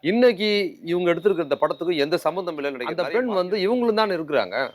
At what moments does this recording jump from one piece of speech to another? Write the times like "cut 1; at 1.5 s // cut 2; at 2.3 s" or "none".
cut 1; at 2.8 s